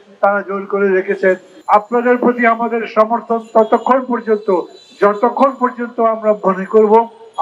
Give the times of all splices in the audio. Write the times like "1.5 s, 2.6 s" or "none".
1.5 s